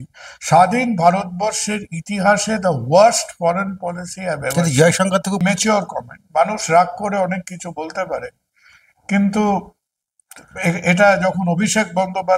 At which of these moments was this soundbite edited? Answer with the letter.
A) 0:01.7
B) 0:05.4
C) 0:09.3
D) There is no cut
B